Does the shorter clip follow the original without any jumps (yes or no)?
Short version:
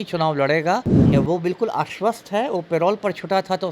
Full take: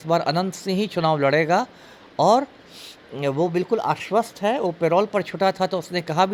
no